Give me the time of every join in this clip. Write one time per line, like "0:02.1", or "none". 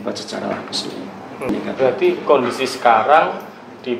0:01.5

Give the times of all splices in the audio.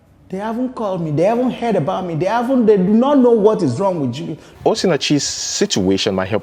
0:04.6

